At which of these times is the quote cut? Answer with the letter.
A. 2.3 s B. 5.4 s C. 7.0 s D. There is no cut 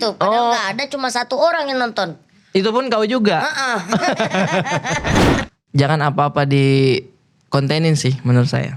B